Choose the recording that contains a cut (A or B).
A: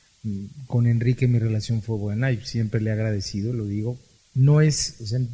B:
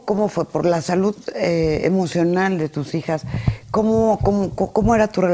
A